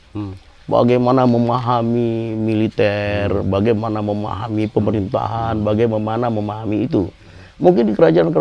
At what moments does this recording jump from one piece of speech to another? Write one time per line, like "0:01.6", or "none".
none